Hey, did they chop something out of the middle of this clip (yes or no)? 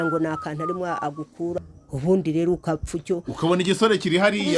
yes